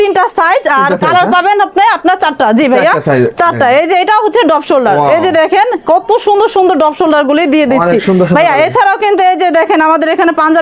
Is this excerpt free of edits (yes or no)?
yes